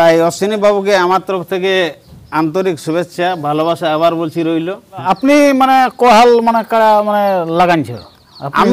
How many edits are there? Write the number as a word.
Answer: one